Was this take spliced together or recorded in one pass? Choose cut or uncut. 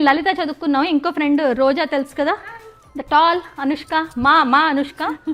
uncut